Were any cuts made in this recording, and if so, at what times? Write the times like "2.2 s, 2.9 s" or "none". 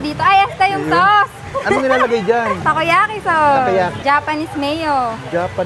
2.6 s, 4.0 s